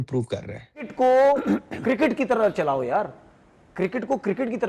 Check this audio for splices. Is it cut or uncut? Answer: cut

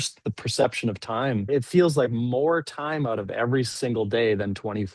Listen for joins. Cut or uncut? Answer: cut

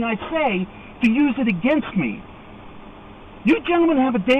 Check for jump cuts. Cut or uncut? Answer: uncut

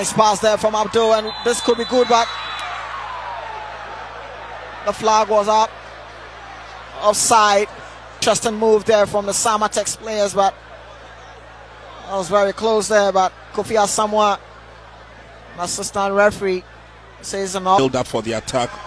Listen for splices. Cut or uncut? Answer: uncut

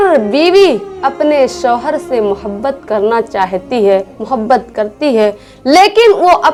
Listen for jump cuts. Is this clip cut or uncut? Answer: uncut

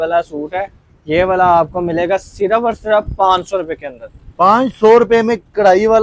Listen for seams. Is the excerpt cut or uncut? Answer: uncut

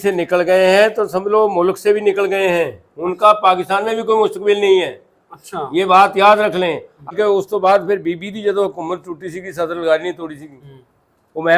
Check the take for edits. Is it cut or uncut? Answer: cut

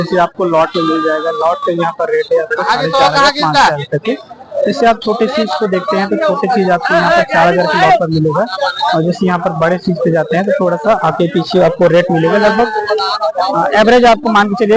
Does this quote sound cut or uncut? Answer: uncut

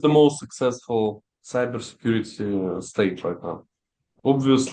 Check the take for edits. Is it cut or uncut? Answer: uncut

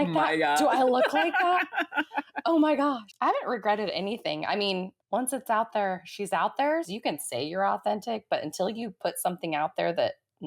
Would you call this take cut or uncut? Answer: cut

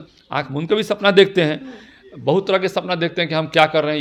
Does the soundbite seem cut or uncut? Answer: uncut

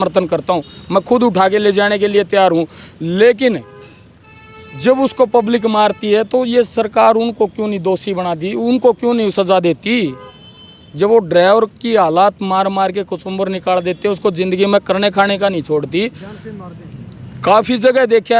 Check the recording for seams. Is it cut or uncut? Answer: uncut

